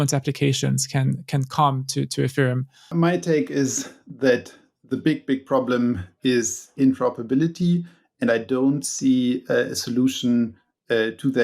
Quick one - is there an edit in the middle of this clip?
yes; 1 cut; at 2.7 s

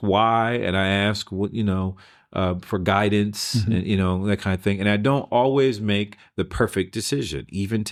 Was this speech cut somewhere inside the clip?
no; 0 cuts

